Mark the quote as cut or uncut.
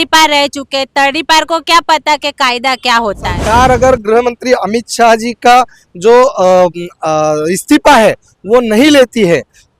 cut